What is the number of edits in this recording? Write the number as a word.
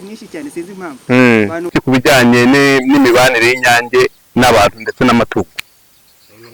one